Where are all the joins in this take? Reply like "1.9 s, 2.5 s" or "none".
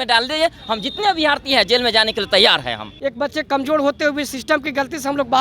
2.8 s